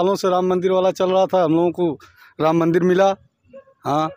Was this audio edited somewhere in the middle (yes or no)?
no